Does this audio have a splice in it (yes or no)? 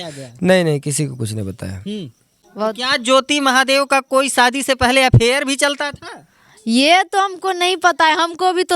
yes